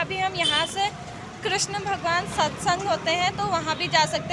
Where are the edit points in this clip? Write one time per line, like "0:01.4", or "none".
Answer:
none